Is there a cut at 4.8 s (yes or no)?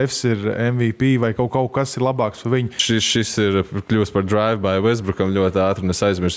no